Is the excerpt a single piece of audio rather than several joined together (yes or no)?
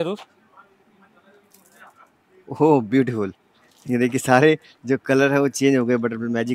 yes